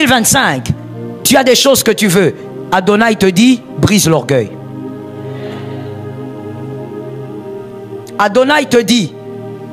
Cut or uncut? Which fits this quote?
uncut